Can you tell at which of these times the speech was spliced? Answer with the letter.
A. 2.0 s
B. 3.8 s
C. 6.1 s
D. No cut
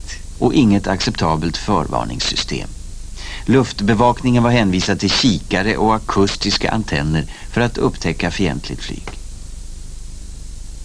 D